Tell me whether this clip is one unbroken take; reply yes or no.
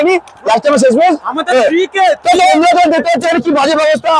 no